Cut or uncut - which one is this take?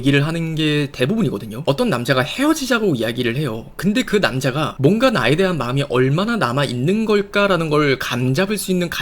cut